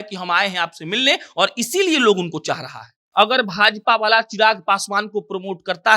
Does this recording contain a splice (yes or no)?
yes